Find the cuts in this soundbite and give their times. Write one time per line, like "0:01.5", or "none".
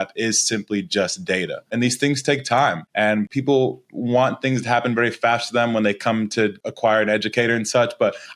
0:01.7
0:03.2
0:06.6